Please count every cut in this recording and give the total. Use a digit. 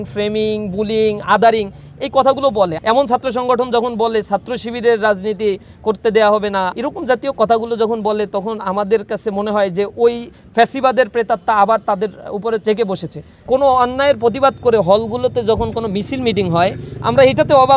3